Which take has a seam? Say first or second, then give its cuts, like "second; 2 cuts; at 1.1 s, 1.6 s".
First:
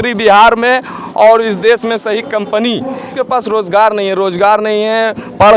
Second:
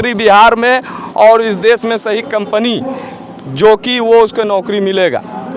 first; 1 cut; at 3.1 s